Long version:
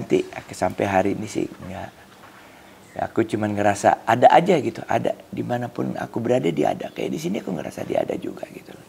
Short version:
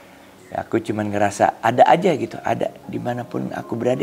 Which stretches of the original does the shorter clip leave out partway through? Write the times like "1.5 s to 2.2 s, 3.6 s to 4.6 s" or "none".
none

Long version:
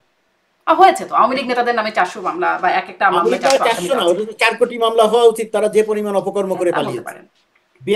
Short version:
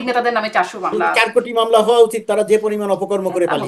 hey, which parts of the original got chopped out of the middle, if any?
2.5 s to 4.4 s

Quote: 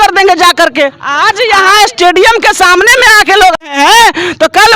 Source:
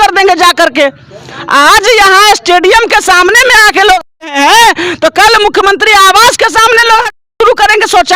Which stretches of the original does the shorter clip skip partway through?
1.1 s to 1.6 s, 4.1 s to 4.3 s

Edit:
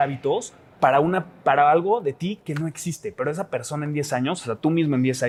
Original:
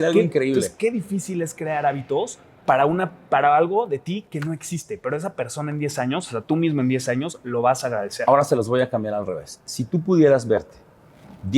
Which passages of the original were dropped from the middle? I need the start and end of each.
none

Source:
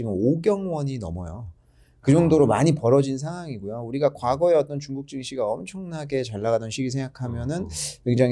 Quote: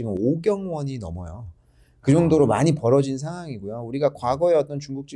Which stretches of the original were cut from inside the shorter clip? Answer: none

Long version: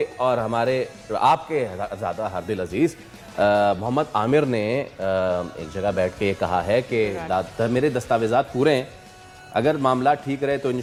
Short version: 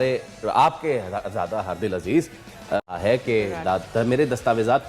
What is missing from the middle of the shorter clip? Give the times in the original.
3.5 s to 6.4 s

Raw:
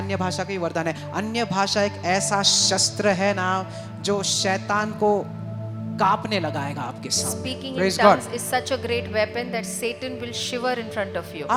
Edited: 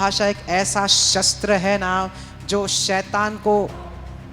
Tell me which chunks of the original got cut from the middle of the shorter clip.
none

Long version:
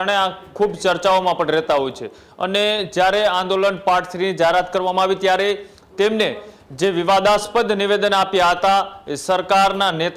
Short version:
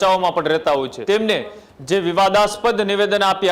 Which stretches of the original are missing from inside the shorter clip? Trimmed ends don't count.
2.0 s to 5.9 s

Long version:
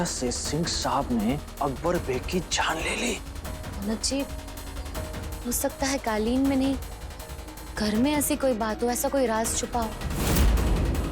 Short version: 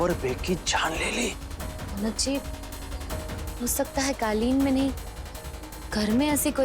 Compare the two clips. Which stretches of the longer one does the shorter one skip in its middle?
none

